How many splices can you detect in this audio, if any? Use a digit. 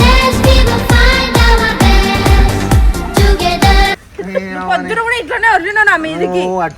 1